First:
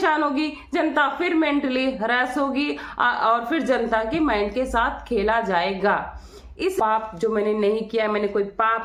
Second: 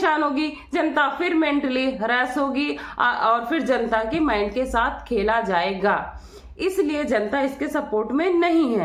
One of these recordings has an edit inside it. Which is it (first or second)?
first